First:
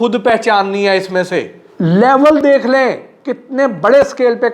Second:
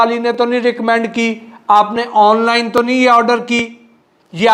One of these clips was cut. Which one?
first; 1 cut; at 1.6 s

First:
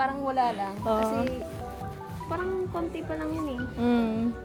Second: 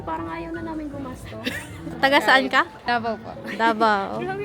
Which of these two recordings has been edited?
second; 2 cuts; at 1.9 s, 2.8 s

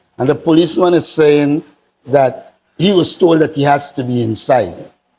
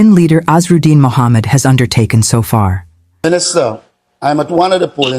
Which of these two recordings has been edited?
second; 1 cut; at 3.0 s

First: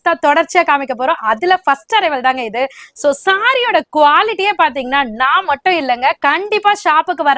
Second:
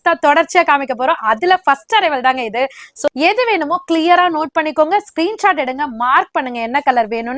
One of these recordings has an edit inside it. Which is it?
second; 1 cut; at 3.1 s

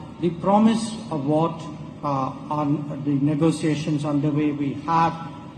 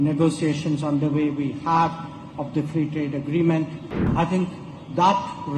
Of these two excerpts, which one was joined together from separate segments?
second; 1 cut; at 4.1 s

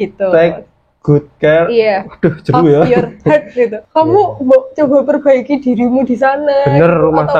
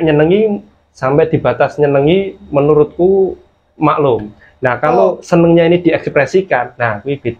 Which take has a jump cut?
first; 1 cut; at 3.8 s

